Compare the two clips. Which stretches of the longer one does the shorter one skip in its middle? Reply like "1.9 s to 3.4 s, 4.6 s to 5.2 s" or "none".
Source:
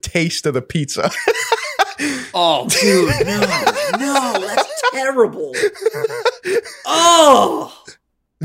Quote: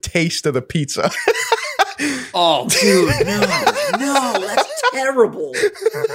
none